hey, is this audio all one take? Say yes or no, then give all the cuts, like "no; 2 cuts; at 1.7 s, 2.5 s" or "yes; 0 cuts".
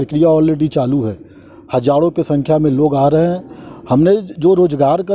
yes; 0 cuts